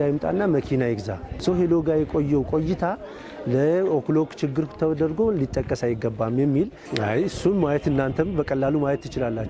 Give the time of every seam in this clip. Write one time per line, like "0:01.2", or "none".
0:01.2
0:06.8